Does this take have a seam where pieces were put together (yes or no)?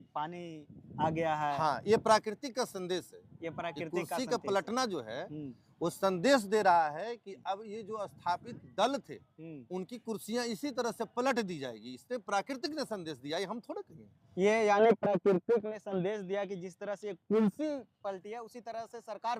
no